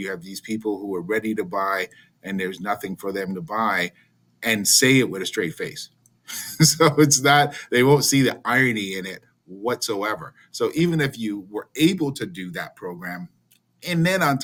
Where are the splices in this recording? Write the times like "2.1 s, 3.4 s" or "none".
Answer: none